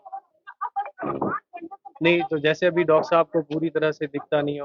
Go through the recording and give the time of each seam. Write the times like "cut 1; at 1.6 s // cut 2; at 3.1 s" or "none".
none